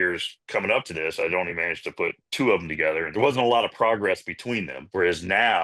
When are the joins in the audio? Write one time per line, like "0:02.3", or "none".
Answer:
0:03.1

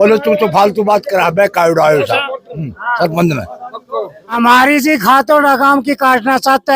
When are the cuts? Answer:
0:04.3

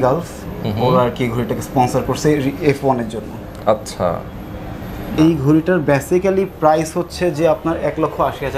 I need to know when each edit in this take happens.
0:05.2

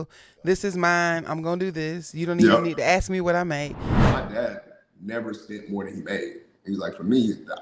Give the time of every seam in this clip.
0:04.0

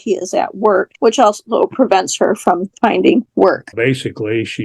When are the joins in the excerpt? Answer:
0:00.9
0:03.6

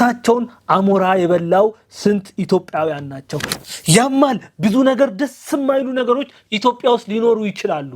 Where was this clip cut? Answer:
0:03.5

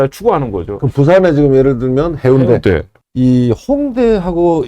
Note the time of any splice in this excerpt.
0:02.9

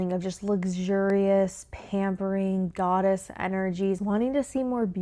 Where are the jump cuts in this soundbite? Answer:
0:04.0

